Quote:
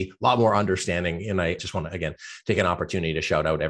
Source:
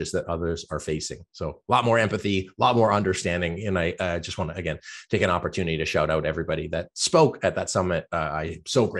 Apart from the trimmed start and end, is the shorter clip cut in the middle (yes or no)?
yes